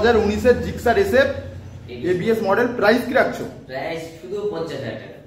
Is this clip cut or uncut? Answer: uncut